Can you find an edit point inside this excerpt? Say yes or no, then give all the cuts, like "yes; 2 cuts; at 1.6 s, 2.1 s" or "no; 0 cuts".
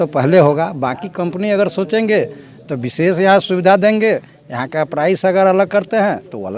no; 0 cuts